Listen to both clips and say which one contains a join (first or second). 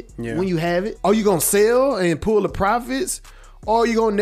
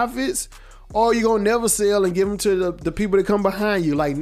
first